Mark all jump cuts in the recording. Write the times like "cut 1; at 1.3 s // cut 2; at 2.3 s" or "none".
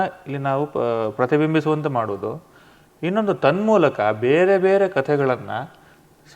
none